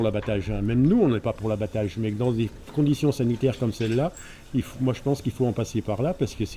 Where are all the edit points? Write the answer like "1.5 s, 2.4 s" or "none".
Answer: none